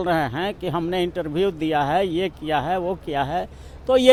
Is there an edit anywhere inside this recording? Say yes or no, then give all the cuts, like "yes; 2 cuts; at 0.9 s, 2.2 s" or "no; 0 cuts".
no; 0 cuts